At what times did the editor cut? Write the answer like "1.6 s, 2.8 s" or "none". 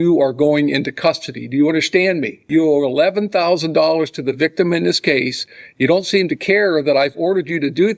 2.4 s